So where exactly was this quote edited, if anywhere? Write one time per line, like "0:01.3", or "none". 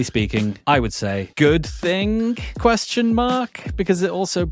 0:00.8
0:02.5

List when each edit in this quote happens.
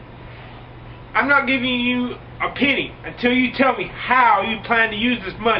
0:03.1

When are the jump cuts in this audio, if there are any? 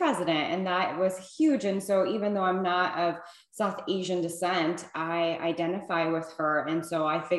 none

